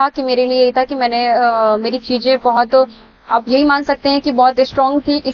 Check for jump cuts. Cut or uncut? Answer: uncut